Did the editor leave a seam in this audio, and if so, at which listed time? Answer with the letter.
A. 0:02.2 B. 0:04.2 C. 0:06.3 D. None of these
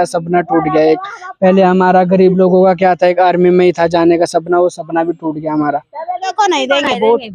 C